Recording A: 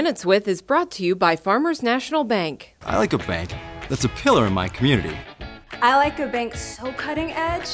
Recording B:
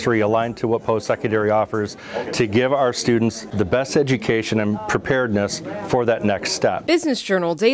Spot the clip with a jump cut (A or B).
B